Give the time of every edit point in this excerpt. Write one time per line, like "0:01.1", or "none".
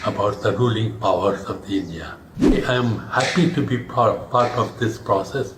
0:02.6